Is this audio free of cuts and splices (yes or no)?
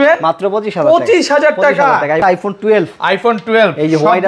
no